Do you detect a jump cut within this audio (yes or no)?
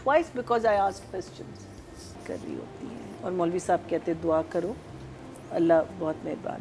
yes